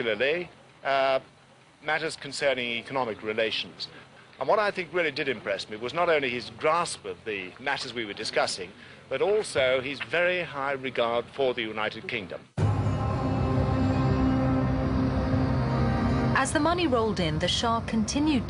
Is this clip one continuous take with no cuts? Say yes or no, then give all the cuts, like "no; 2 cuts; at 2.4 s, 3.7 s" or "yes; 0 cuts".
no; 1 cut; at 4.8 s